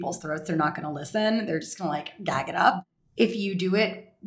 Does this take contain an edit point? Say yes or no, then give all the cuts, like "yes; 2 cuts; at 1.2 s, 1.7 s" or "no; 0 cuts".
yes; 1 cut; at 2.9 s